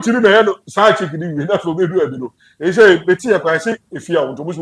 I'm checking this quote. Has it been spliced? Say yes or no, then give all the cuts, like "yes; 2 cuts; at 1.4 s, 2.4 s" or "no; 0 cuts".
no; 0 cuts